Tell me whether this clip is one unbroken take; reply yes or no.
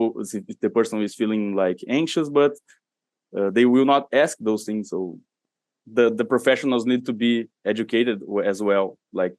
no